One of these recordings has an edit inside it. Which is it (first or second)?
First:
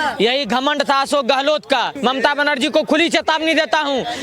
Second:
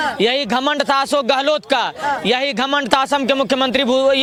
first